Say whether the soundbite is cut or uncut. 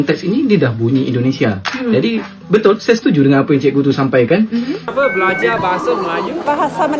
cut